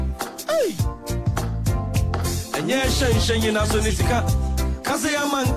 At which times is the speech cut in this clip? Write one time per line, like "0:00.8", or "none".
none